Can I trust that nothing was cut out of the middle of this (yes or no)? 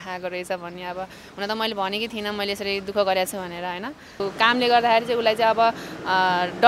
no